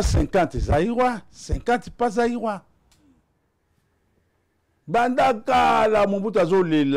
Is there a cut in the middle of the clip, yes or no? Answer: yes